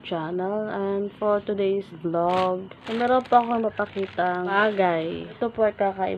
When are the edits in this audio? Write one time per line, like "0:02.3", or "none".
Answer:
0:01.9
0:02.7
0:04.5
0:05.4